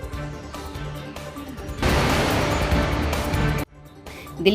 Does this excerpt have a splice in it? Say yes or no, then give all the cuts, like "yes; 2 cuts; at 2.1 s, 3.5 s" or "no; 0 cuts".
yes; 1 cut; at 1.0 s